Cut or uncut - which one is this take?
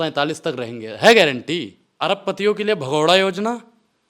cut